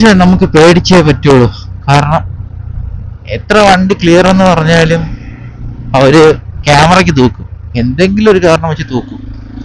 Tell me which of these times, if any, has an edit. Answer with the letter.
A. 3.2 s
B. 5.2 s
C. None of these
C